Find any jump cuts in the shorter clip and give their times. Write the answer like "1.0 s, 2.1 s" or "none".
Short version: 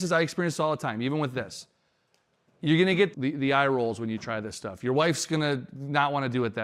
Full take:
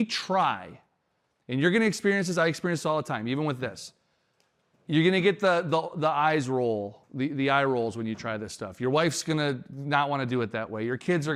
3.1 s